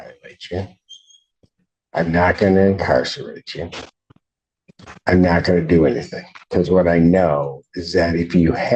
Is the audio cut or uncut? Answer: cut